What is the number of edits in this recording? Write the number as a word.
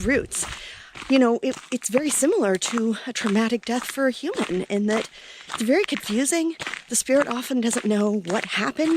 zero